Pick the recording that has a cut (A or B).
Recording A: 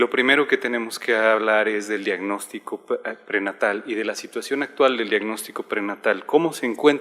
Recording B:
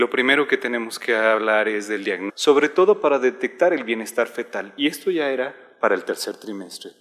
A